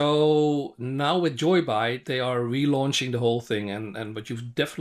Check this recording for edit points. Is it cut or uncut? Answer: uncut